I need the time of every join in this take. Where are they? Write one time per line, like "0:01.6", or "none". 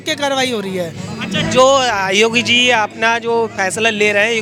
none

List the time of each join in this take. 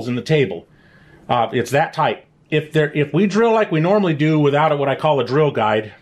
none

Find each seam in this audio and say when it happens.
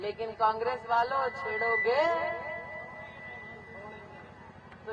none

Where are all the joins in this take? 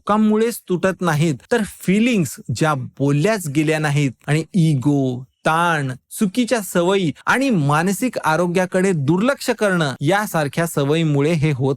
0:01.4
0:04.2
0:09.9

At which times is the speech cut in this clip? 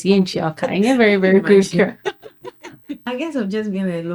0:03.0

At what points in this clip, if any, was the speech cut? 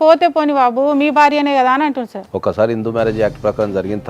0:02.2

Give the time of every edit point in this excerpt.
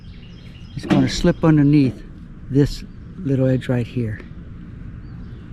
none

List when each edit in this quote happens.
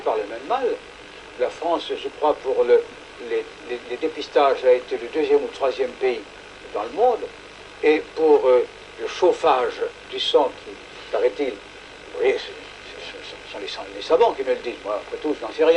none

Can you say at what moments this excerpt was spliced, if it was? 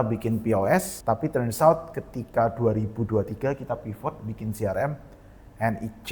0:00.9

